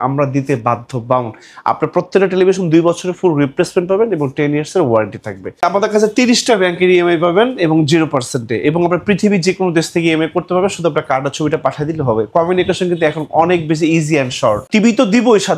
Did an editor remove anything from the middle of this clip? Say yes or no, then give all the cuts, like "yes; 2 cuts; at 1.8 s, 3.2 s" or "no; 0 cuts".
yes; 2 cuts; at 5.6 s, 14.6 s